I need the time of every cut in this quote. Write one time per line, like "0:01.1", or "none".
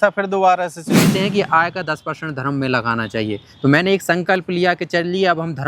0:01.1